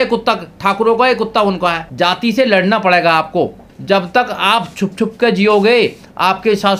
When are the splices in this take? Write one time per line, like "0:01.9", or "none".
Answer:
0:01.8
0:03.7